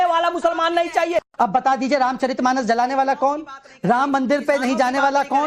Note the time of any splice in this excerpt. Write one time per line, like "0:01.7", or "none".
0:01.3